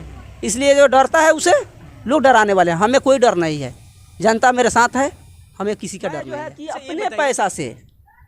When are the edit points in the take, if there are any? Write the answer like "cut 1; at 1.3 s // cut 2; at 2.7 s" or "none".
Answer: cut 1; at 6.6 s